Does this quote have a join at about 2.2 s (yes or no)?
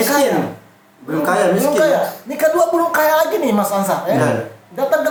no